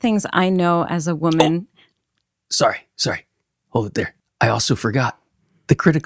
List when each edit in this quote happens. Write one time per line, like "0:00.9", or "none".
0:04.2